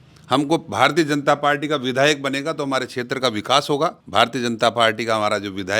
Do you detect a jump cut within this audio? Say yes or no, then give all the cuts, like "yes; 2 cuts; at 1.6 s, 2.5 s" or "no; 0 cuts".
yes; 1 cut; at 4.0 s